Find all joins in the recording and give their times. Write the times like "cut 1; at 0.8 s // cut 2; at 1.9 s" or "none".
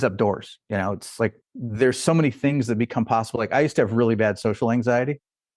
cut 1; at 1.5 s